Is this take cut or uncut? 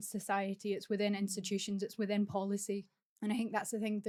uncut